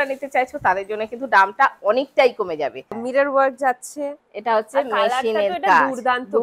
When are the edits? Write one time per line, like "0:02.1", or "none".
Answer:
0:03.0